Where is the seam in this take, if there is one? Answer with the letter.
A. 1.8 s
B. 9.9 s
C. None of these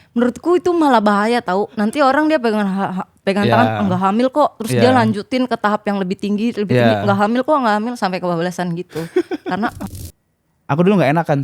B